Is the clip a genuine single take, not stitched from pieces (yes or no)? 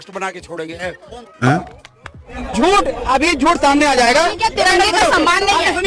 no